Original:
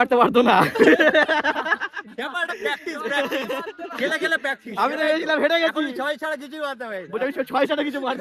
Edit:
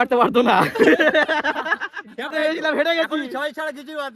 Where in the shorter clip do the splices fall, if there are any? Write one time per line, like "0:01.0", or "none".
0:02.3